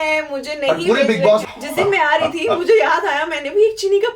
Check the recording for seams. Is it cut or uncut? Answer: cut